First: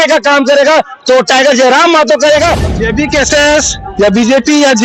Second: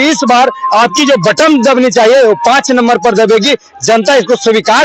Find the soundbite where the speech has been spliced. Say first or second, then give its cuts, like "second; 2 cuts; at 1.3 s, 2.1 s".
first; 1 cut; at 2.6 s